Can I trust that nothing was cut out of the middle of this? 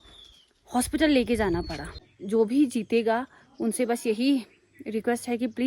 no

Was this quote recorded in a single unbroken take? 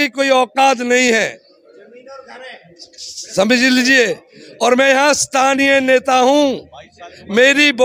yes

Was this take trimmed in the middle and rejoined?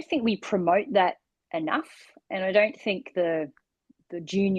no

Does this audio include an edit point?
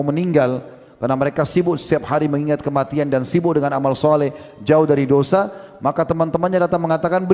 no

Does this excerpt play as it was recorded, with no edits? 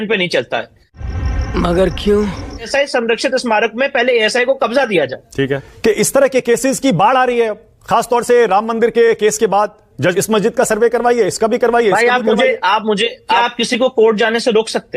no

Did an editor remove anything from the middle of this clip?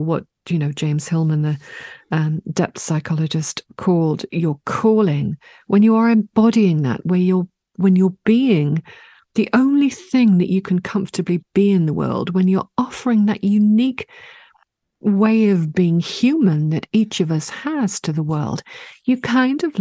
no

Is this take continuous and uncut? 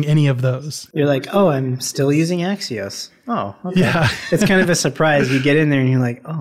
yes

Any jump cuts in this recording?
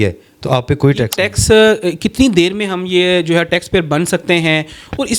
yes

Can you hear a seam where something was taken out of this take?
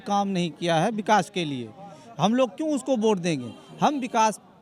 no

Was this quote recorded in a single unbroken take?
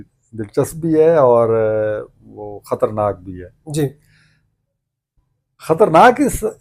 yes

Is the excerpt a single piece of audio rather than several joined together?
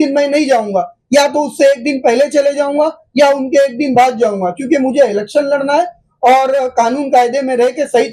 yes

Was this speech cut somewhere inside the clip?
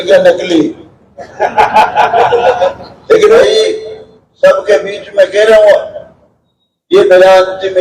yes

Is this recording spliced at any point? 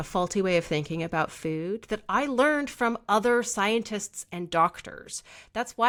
no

